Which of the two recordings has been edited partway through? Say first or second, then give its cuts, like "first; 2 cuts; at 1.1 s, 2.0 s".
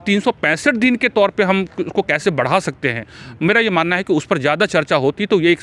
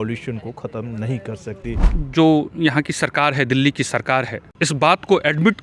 second; 2 cuts; at 2.0 s, 4.4 s